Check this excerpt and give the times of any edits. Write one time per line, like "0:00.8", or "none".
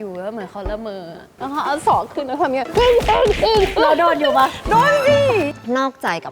0:01.2
0:05.5